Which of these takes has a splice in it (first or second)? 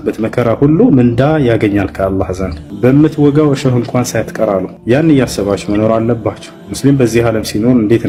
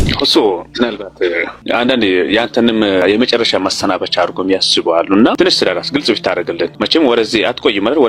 second